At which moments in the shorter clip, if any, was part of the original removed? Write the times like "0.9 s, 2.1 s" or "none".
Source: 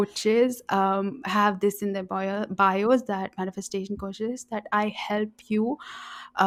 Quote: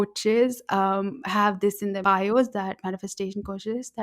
2.0 s